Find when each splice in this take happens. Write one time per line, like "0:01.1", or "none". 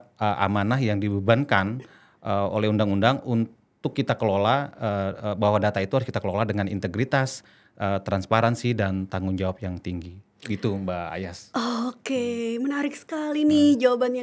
none